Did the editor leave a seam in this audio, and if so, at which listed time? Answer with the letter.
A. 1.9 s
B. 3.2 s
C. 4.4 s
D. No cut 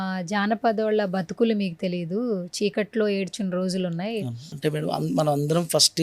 C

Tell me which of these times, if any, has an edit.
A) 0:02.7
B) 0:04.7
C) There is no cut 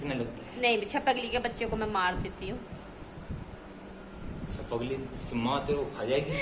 C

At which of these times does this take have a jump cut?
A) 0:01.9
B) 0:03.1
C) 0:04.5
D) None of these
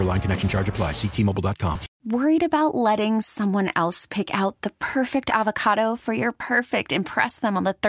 A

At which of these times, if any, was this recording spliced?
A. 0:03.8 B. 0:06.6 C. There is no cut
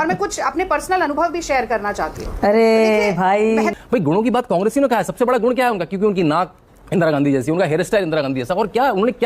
A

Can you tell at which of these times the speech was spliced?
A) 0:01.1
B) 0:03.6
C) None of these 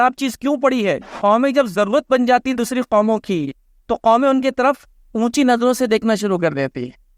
A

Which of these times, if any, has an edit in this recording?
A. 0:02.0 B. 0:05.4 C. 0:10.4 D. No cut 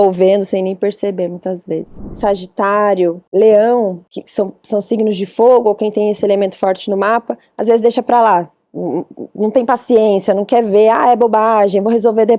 A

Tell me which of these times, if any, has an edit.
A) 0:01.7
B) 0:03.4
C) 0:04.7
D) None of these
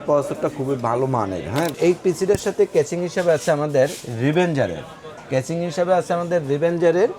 A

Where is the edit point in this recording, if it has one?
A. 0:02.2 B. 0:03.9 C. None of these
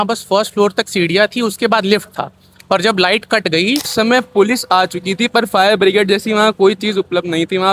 B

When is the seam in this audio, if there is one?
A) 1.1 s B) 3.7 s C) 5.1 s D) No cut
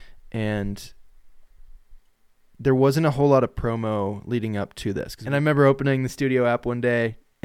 C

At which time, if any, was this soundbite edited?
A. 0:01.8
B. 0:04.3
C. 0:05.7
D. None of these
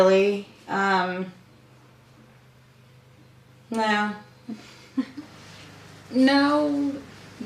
D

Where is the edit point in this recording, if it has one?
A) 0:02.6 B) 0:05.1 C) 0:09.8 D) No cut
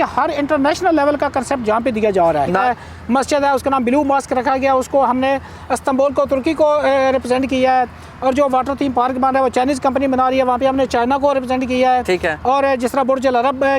A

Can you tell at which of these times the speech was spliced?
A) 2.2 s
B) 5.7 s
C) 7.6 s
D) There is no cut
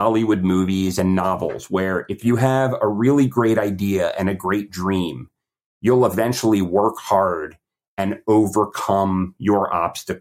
A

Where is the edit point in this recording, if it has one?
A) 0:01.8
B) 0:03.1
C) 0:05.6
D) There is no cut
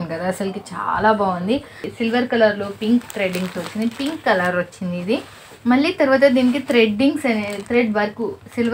A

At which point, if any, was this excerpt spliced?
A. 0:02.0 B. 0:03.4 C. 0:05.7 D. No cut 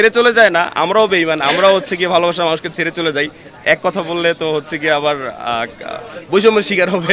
D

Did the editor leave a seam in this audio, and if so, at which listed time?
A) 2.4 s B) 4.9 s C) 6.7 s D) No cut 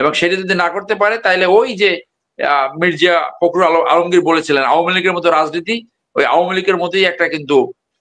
D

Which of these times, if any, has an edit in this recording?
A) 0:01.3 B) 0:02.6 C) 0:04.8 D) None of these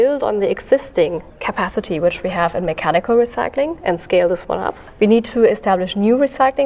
C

